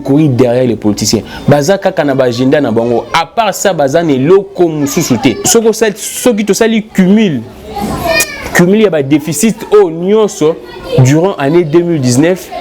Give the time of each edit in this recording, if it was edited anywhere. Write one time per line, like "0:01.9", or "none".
0:05.5